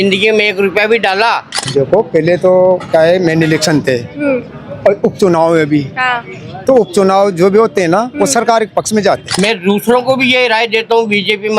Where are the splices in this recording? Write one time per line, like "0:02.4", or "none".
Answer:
0:01.6
0:09.3